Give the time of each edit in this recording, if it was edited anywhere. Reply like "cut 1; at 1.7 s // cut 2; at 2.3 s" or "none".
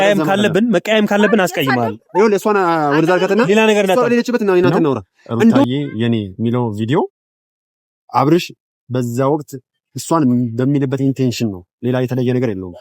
cut 1; at 5.6 s